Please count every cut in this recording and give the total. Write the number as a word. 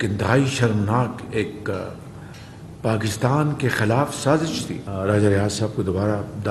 one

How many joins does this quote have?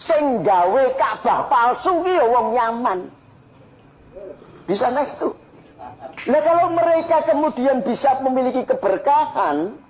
one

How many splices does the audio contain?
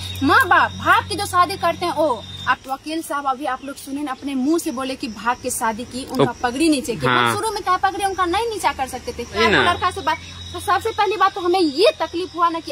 one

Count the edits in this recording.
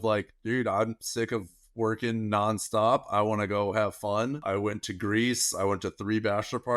one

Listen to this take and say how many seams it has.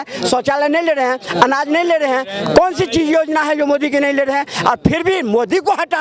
zero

